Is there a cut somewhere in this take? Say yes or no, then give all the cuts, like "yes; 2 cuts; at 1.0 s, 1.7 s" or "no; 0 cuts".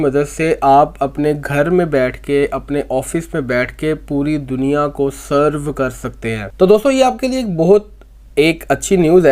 yes; 1 cut; at 6.4 s